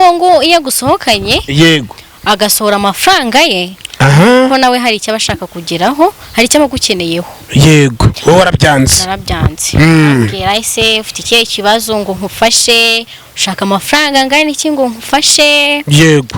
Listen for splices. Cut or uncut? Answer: cut